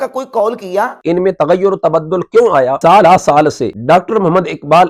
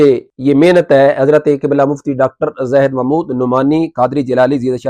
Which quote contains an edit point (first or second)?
first